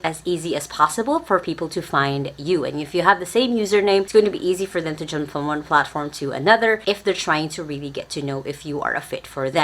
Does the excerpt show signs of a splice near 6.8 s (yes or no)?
yes